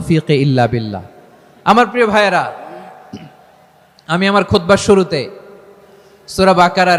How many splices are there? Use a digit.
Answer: 0